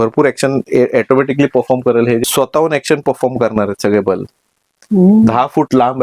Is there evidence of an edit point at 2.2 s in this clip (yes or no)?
yes